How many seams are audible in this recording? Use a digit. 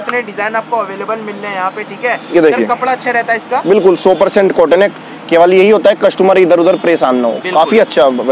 0